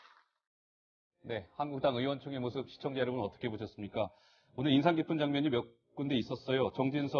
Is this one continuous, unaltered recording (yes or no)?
no